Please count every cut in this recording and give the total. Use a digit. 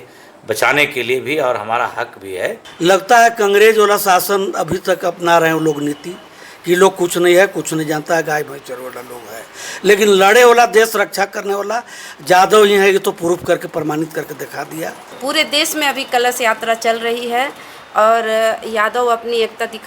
2